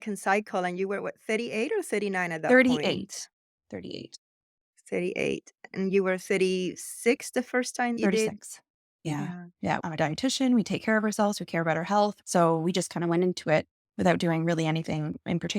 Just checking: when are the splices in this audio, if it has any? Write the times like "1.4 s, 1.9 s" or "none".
8.0 s, 9.8 s, 12.1 s